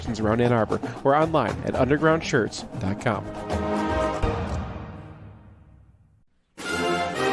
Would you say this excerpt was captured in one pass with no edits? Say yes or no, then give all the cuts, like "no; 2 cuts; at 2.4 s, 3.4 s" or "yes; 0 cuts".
no; 1 cut; at 6.3 s